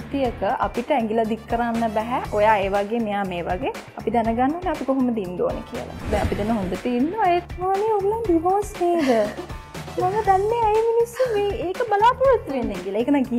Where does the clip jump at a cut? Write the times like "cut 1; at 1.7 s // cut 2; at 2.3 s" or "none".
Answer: cut 1; at 6.1 s // cut 2; at 7.4 s